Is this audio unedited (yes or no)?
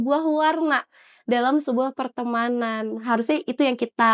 yes